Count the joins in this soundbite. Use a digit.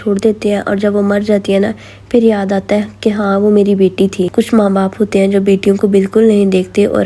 0